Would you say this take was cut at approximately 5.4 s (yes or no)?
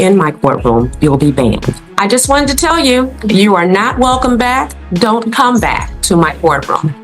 no